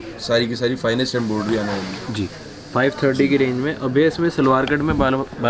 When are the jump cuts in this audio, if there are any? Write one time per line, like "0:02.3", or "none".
none